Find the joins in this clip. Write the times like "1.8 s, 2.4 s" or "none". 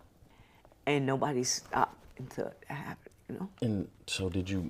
none